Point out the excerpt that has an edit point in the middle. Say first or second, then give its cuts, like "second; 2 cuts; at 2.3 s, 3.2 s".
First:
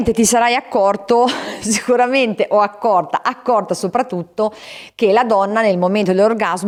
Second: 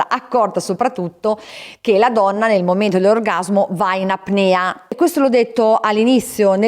second; 1 cut; at 5.0 s